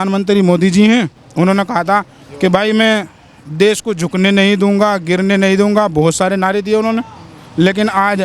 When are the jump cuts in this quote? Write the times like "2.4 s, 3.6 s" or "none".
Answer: 1.2 s, 2.2 s